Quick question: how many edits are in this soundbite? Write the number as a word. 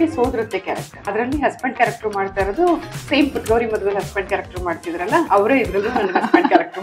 two